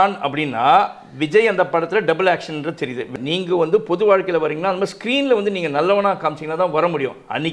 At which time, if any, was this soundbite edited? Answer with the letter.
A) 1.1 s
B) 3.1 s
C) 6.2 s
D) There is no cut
B